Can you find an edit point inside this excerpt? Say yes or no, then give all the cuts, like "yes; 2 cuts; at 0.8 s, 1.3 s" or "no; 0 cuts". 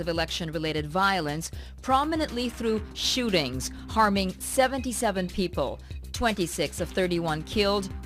yes; 1 cut; at 5.1 s